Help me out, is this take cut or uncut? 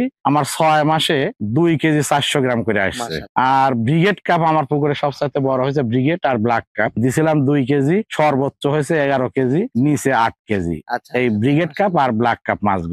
uncut